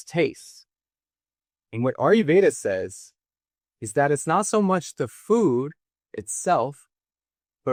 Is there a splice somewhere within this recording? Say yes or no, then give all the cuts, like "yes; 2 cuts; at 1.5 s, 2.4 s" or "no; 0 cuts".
no; 0 cuts